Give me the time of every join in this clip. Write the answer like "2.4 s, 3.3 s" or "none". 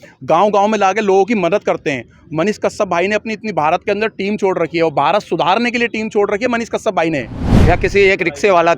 7.5 s